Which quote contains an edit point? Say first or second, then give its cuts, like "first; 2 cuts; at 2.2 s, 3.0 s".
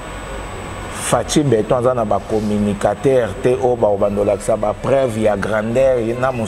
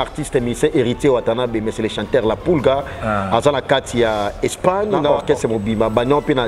second; 1 cut; at 5.2 s